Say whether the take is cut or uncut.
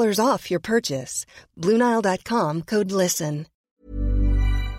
cut